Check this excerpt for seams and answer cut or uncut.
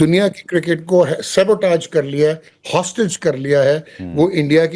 uncut